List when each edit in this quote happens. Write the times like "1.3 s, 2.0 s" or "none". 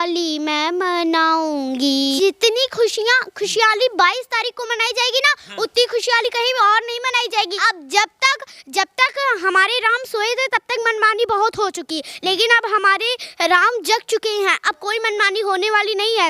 2.2 s, 7.5 s